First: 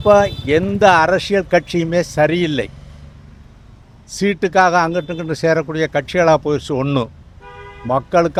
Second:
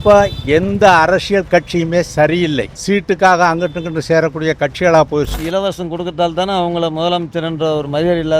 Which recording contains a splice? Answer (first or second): second